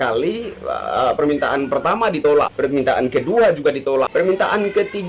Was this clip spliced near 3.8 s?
yes; 2 cuts; at 2.2 s, 3.8 s

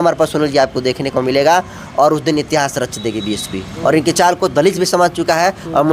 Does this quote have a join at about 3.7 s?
yes; 1 cut; at 3.7 s

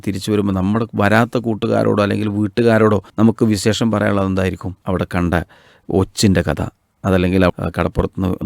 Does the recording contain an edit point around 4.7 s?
yes; 2 cuts; at 3.1 s, 4.7 s

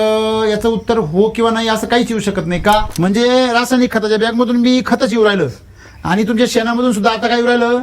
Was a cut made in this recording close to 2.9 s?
yes; 1 cut; at 2.9 s

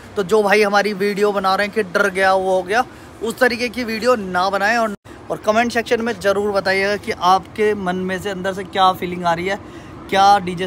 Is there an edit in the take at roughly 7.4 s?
no; 1 cut; at 5.0 s

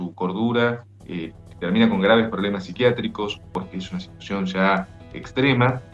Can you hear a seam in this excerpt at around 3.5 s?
yes; 1 cut; at 3.5 s

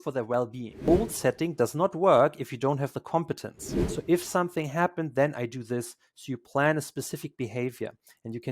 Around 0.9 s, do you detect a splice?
yes; 2 cuts; at 0.9 s, 3.9 s

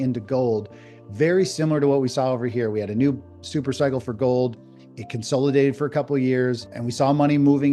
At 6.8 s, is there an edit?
yes; 1 cut; at 6.8 s

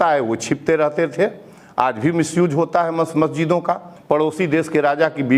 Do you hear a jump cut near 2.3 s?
no; 1 cut; at 3.9 s

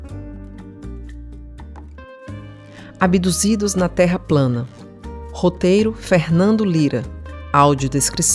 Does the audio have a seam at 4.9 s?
no; 1 cut; at 1.8 s

